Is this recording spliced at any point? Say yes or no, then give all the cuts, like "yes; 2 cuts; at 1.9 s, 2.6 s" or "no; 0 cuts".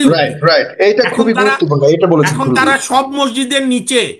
no; 0 cuts